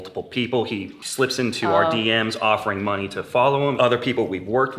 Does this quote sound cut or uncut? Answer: cut